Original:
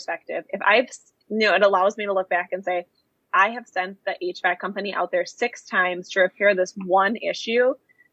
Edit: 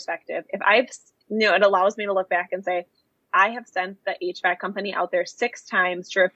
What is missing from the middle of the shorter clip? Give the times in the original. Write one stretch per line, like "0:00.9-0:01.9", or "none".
none